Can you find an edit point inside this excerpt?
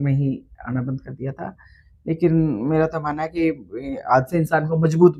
no; 0 cuts

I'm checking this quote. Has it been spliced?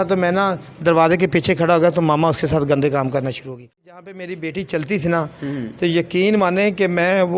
yes; 1 cut; at 3.9 s

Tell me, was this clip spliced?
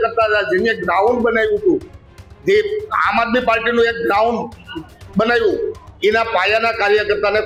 no; 0 cuts

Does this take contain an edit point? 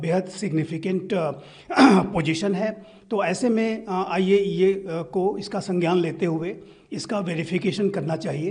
no; 0 cuts

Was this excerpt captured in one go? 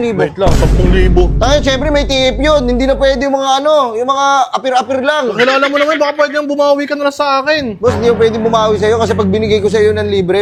yes; 0 cuts

